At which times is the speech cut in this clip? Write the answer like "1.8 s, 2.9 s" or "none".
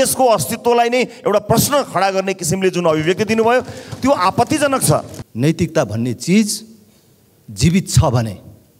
5.2 s